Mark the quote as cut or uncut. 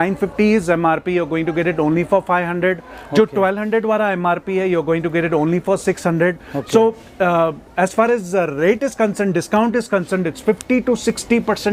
uncut